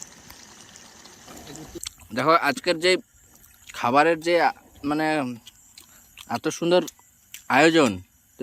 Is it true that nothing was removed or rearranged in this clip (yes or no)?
no